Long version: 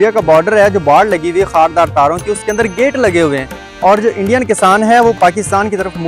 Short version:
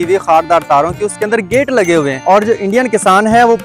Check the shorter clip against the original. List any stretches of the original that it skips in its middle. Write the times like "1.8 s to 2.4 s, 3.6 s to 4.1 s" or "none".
3.4 s to 3.7 s